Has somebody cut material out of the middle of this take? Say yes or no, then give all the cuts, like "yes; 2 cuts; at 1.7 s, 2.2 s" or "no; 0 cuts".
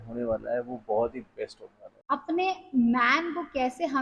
yes; 1 cut; at 1.9 s